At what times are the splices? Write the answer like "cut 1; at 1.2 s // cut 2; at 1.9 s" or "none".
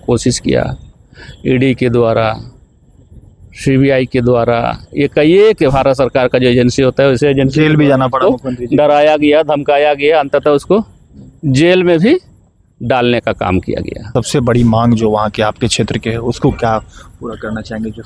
cut 1; at 14.1 s